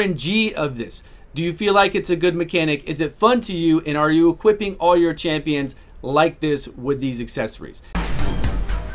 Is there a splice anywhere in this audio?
yes; 1 cut; at 8.0 s

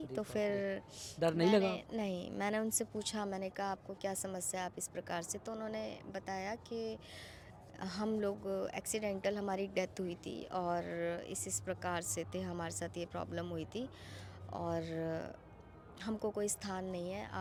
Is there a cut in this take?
no; 0 cuts

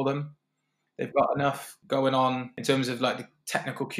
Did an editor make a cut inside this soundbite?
yes; 2 cuts; at 1.7 s, 2.5 s

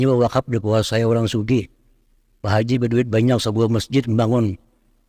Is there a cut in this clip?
no; 0 cuts

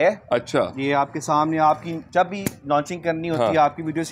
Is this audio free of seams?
yes; 0 cuts

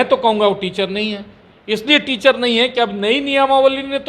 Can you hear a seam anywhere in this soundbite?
no; 0 cuts

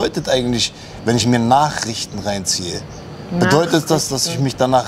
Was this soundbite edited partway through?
no; 0 cuts

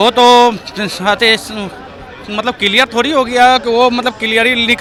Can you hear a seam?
no; 0 cuts

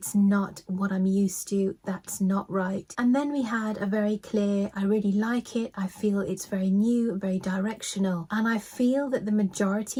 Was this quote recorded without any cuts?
yes; 0 cuts

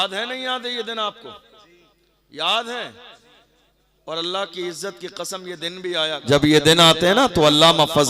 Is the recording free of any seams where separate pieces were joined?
no; 1 cut; at 6.1 s

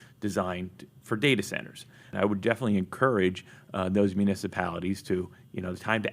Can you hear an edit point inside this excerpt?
yes; 1 cut; at 2.1 s

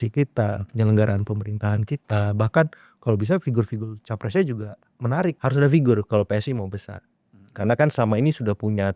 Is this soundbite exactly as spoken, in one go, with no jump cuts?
no; 1 cut; at 5.4 s

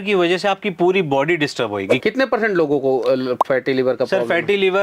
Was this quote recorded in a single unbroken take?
no; 1 cut; at 1.9 s

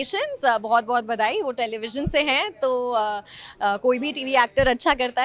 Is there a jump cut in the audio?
no; 0 cuts

